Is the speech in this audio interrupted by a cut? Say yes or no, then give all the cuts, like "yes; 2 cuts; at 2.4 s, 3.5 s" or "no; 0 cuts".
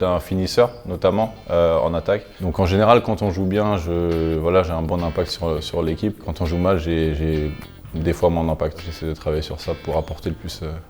yes; 3 cuts; at 2.4 s, 6.3 s, 8.9 s